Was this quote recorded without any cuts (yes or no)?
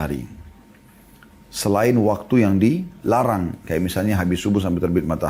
yes